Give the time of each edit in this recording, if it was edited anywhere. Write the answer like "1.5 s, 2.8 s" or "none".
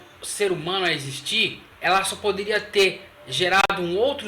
1.7 s